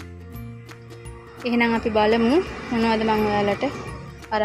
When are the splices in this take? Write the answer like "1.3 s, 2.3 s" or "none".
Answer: 1.4 s